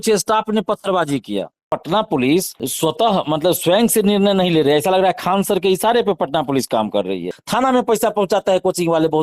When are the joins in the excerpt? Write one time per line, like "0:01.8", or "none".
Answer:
0:01.7
0:02.6
0:07.4